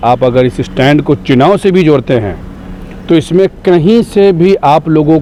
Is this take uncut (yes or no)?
yes